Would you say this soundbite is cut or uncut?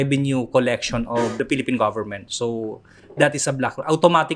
cut